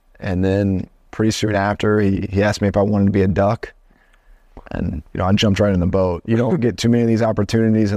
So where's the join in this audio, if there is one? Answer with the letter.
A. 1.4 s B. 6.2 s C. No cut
C